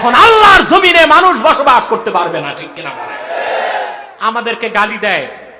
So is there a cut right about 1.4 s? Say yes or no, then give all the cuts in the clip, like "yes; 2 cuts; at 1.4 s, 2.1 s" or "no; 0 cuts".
no; 1 cut; at 4.1 s